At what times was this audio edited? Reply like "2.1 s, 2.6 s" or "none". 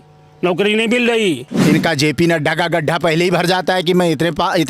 1.5 s